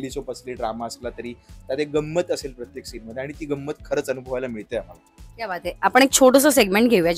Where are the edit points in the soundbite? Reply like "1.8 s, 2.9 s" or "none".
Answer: none